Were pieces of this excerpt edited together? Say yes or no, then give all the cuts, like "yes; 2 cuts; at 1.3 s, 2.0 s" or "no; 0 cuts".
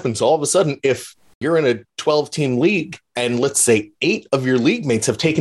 yes; 1 cut; at 1.4 s